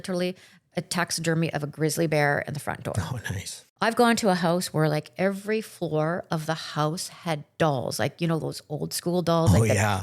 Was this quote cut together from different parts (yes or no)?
yes